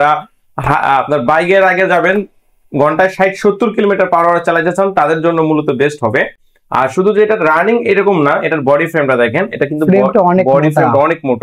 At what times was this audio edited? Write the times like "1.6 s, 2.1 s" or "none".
none

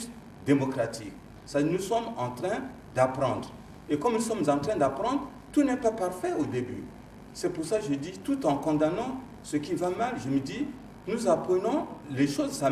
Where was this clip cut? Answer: none

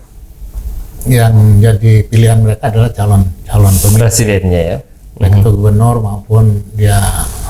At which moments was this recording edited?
none

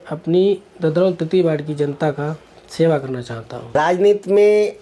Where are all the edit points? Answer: 3.7 s

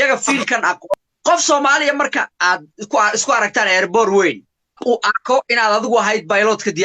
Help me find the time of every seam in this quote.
0.9 s, 4.8 s

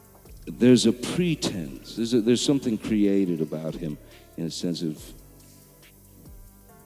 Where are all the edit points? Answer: none

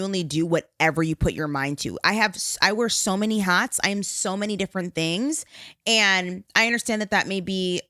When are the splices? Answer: none

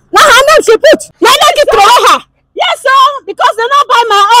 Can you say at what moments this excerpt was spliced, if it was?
1.1 s

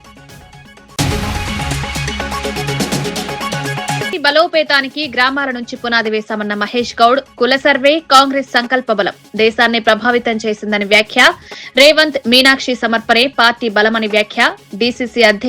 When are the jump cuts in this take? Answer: 0.9 s, 4.1 s

